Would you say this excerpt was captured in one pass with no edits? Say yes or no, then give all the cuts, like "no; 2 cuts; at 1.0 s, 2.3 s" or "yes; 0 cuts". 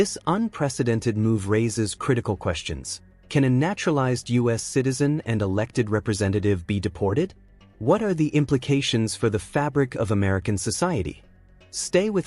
no; 1 cut; at 1.4 s